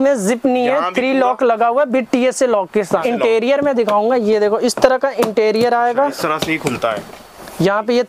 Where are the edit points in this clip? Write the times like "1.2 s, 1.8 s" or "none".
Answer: 3.0 s